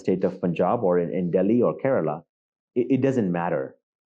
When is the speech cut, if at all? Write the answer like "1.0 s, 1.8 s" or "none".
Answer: none

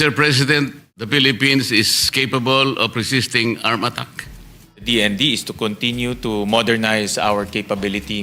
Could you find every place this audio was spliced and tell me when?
0.9 s, 4.8 s

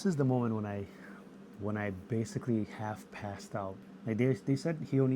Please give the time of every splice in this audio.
3.7 s

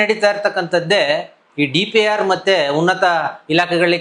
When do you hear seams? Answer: none

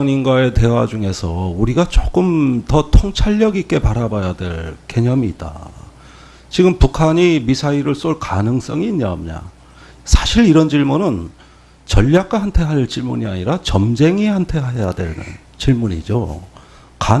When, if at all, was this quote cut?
none

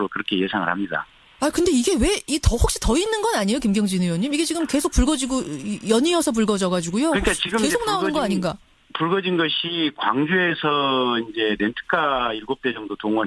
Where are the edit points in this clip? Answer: none

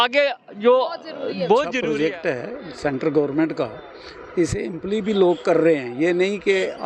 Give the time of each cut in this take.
1.8 s

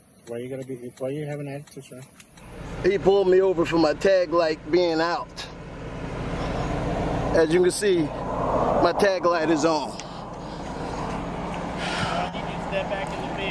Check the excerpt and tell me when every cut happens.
2.7 s

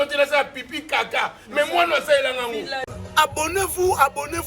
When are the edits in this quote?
2.9 s

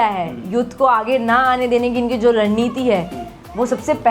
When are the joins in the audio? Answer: none

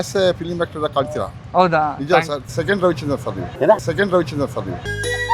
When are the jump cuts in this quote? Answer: 2.5 s

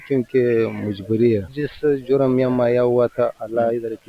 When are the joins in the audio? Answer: 1.5 s

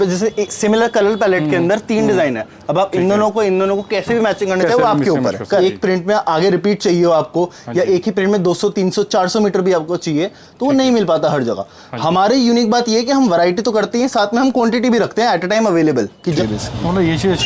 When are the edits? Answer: 5.6 s, 16.4 s

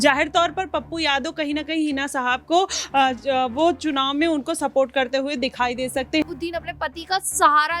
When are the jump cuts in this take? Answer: 6.2 s

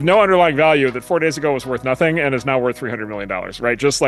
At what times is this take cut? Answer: none

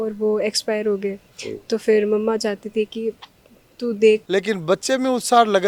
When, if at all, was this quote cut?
4.2 s

